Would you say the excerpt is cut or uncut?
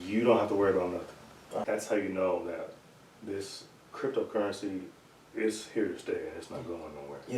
cut